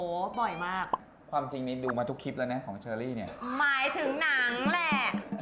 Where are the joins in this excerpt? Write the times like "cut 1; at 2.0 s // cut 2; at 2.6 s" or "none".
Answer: cut 1; at 1.1 s